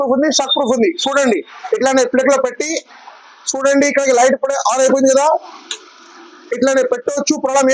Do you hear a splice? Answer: no; 0 cuts

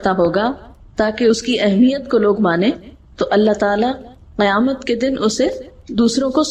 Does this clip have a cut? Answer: no; 0 cuts

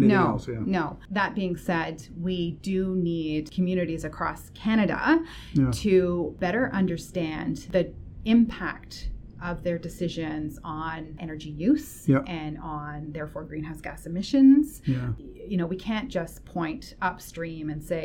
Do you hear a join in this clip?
yes; 6 cuts; at 1.0 s, 3.5 s, 6.3 s, 7.6 s, 11.2 s, 15.1 s

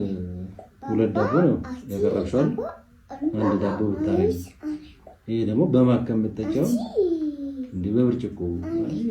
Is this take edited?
no; 0 cuts

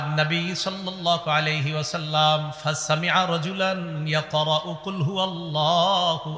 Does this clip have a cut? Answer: no; 0 cuts

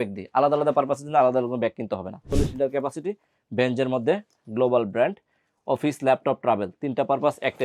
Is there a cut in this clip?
yes; 1 cut; at 2.3 s

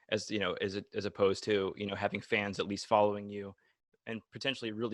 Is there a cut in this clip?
no; 0 cuts

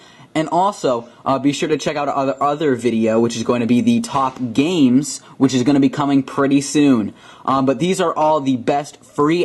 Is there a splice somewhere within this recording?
yes; 1 cut; at 6.0 s

